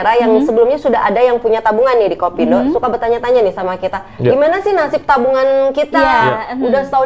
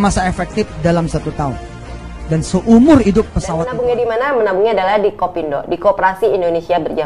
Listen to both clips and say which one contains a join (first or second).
second